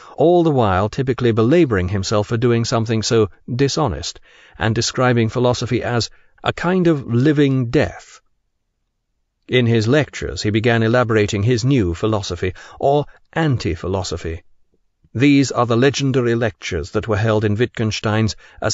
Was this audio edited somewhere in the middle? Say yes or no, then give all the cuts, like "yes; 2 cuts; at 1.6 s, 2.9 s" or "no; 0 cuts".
yes; 1 cut; at 15.8 s